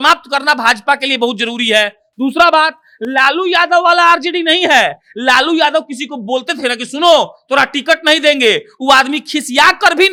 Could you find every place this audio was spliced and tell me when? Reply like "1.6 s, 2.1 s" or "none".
none